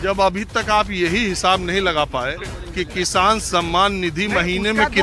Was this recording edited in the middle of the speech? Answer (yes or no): no